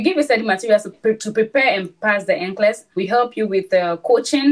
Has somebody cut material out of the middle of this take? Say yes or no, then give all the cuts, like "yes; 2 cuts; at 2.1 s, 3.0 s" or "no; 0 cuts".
yes; 2 cuts; at 0.9 s, 3.0 s